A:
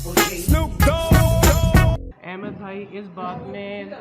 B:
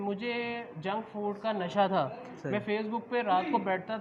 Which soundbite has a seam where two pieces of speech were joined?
A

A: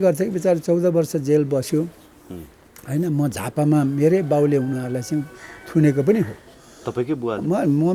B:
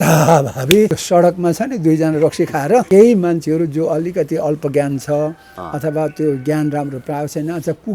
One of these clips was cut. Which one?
B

